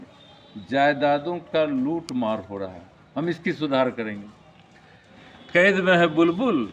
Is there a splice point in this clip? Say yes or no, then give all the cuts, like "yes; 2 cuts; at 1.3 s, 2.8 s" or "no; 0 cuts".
yes; 1 cut; at 5.1 s